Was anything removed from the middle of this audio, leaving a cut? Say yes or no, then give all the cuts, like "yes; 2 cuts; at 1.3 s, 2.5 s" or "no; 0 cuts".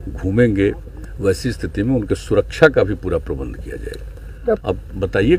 yes; 2 cuts; at 0.9 s, 4.6 s